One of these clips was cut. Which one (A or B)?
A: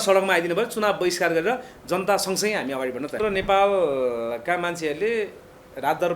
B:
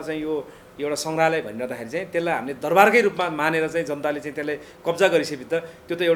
A